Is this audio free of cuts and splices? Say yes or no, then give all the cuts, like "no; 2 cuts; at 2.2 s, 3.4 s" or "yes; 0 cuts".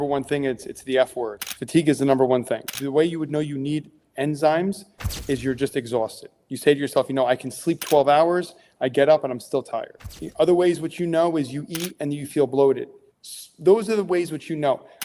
yes; 0 cuts